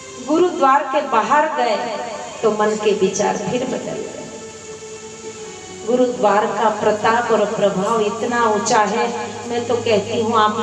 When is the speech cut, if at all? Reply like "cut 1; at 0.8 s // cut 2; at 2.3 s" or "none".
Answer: none